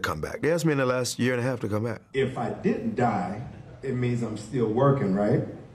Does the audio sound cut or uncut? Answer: cut